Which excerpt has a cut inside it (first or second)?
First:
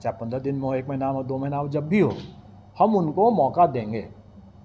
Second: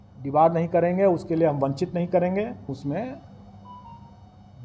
second